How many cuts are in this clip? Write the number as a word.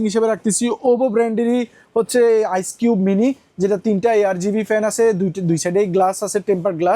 zero